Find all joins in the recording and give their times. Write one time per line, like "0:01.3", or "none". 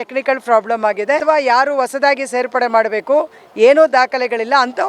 0:01.2